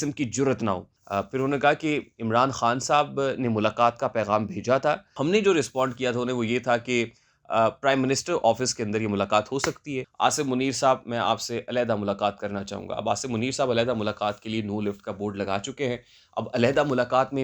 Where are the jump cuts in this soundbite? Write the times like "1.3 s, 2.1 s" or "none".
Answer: 0.9 s, 5.1 s, 10.0 s